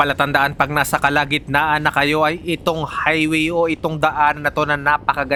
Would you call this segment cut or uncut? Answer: uncut